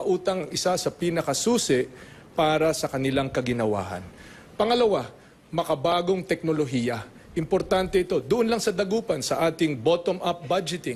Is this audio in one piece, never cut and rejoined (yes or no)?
yes